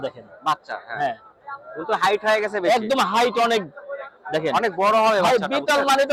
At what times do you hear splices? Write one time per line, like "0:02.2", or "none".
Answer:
none